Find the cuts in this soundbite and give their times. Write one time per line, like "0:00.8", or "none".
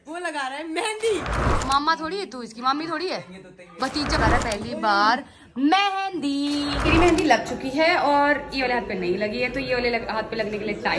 0:04.2
0:06.9